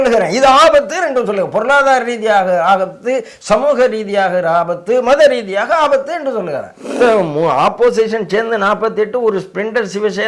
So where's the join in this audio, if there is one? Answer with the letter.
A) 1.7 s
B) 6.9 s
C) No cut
B